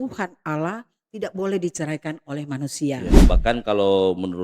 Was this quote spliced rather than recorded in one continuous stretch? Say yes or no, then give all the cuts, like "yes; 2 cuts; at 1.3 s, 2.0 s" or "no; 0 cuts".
yes; 1 cut; at 3.1 s